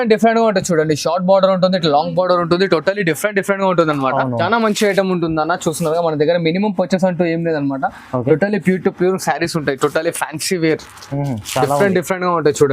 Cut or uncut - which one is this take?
cut